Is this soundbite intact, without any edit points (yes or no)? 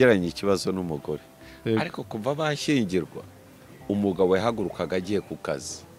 yes